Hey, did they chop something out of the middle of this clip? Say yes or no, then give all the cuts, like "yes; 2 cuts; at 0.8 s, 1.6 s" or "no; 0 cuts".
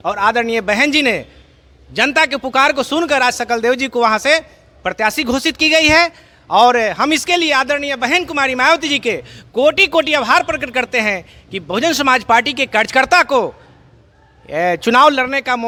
no; 0 cuts